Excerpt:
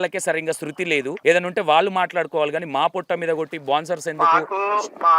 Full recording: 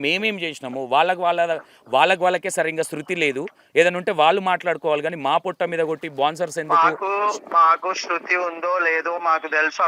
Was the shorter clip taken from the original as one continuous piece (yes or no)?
no